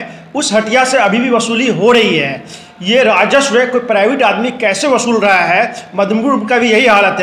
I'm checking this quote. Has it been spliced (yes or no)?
no